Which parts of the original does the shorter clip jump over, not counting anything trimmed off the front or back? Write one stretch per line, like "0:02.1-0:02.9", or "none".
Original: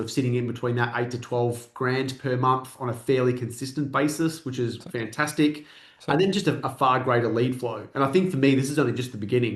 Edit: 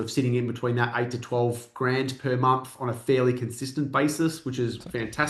none